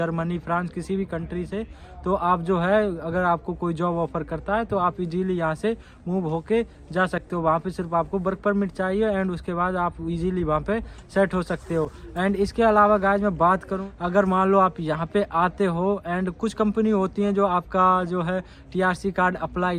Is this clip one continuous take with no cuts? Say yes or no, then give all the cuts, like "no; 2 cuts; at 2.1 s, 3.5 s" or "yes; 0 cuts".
yes; 0 cuts